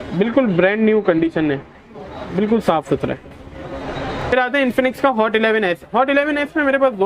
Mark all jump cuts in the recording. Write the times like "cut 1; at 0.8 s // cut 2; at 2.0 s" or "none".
cut 1; at 4.1 s